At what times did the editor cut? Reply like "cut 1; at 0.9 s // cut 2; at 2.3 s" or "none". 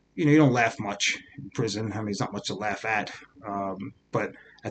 none

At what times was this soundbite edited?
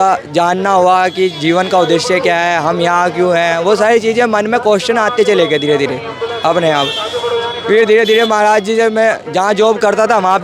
none

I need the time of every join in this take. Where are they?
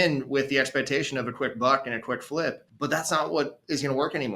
cut 1; at 2.7 s

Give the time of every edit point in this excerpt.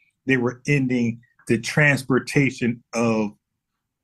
cut 1; at 2.7 s

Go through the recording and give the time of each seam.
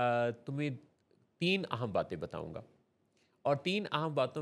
none

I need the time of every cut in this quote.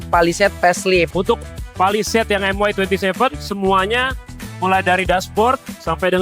cut 1; at 1.1 s

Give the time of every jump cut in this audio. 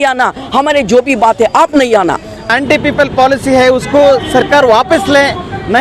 cut 1; at 2.5 s

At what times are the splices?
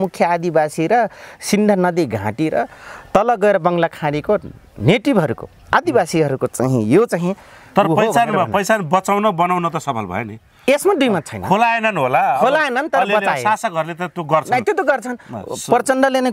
none

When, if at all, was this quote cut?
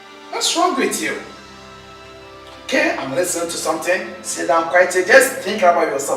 cut 1; at 3.8 s

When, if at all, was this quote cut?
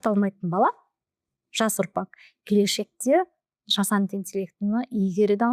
none

